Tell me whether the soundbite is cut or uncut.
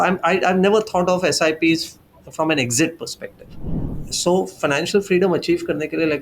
cut